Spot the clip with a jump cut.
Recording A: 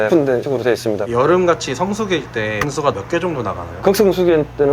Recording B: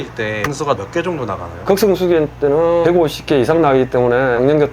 A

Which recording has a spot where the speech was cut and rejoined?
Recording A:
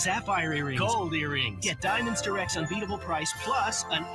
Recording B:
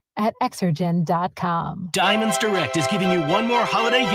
B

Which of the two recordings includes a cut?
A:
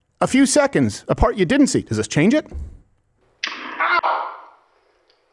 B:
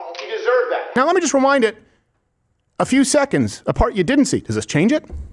B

